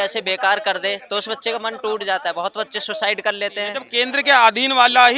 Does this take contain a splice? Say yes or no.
yes